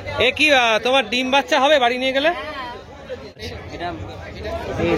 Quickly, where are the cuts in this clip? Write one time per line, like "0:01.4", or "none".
0:03.5